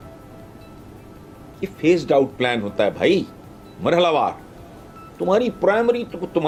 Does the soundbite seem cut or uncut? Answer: uncut